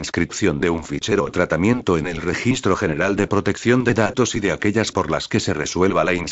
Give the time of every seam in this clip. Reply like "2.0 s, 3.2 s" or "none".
none